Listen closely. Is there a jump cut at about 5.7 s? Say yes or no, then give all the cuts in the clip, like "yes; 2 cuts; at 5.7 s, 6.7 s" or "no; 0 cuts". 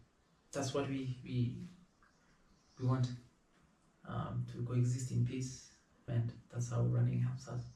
no; 0 cuts